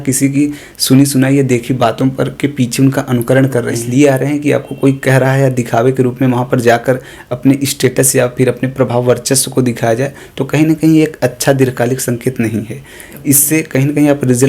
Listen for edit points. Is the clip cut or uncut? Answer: cut